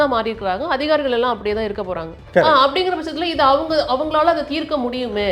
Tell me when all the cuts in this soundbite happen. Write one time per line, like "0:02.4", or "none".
0:02.2